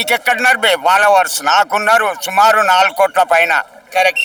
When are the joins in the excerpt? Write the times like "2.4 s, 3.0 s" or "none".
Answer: none